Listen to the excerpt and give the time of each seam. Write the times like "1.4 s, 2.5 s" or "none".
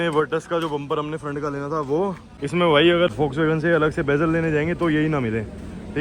2.3 s, 3.1 s